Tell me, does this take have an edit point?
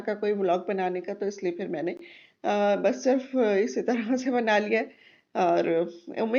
no; 0 cuts

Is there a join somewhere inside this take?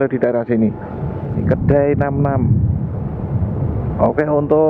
yes; 1 cut; at 1.4 s

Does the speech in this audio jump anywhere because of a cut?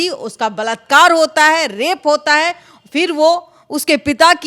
no; 0 cuts

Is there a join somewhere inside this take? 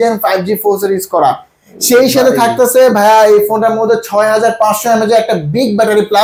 no; 0 cuts

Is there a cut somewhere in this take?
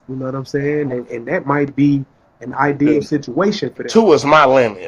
yes; 1 cut; at 3.9 s

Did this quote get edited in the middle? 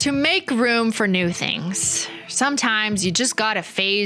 no; 0 cuts

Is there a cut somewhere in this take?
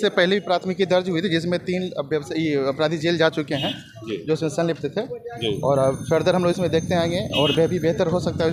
no; 0 cuts

